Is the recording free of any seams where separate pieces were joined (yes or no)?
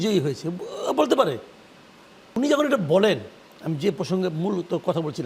no